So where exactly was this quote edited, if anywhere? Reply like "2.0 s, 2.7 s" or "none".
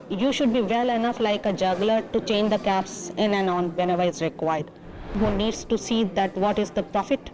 5.2 s